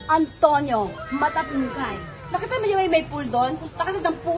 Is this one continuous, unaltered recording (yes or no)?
no